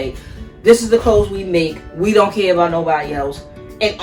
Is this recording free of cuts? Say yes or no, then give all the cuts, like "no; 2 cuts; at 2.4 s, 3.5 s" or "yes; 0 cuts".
yes; 0 cuts